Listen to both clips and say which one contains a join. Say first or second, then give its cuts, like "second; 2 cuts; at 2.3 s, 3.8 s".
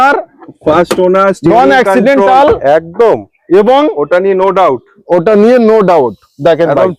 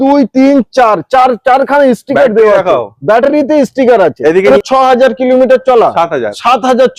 second; 1 cut; at 4.5 s